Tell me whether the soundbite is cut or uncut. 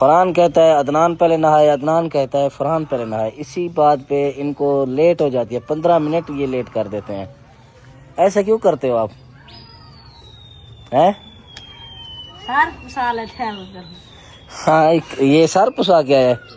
uncut